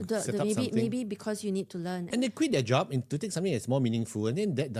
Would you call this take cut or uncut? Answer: cut